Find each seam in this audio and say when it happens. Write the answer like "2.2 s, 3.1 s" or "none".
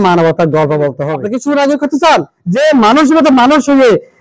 1.1 s, 2.4 s